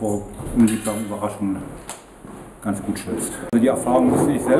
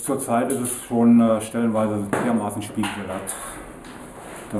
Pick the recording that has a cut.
first; 1 cut; at 3.5 s

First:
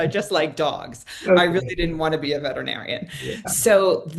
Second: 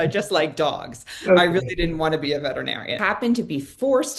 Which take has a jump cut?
second; 1 cut; at 2.9 s

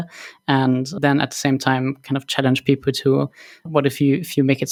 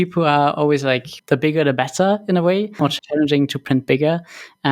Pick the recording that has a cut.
second; 2 cuts; at 1.1 s, 2.9 s

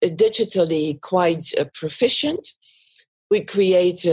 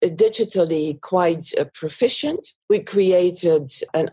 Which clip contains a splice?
second; 1 cut; at 2.5 s

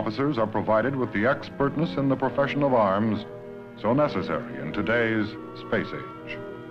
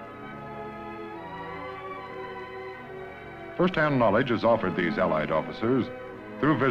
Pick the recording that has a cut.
second; 1 cut; at 3.5 s

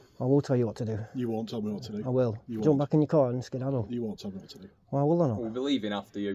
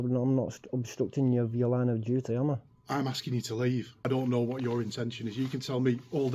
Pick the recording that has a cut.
second; 1 cut; at 4.1 s

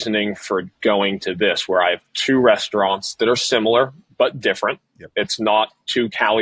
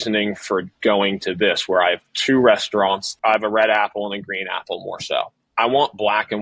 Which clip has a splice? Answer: second; 2 cuts; at 3.1 s, 5.4 s

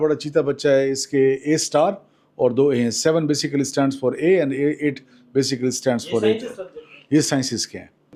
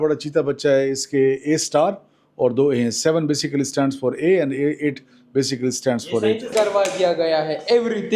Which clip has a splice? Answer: second; 1 cut; at 6.5 s

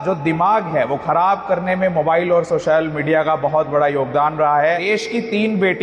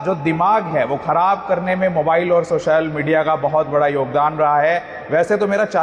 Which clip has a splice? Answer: first; 1 cut; at 4.8 s

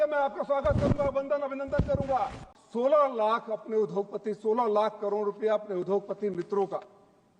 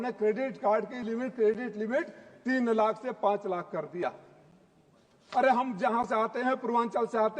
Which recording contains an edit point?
first; 1 cut; at 2.5 s

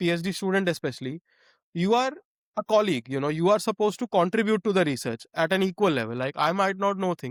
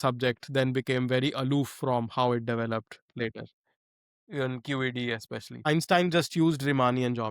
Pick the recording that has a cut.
second; 1 cut; at 5.7 s

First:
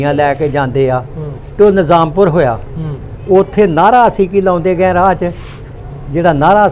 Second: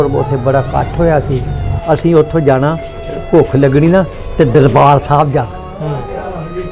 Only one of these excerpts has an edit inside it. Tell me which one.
second; 1 cut; at 1.7 s

